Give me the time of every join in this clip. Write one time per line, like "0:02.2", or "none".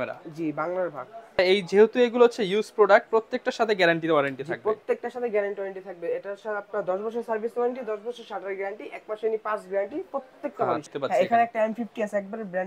0:01.4
0:10.9